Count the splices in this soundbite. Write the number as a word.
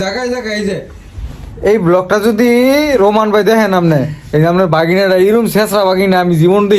zero